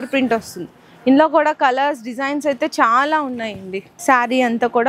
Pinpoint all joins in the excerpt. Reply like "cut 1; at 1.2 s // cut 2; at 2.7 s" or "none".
cut 1; at 3.9 s